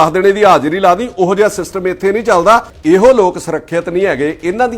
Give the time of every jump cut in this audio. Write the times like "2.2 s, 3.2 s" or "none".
2.7 s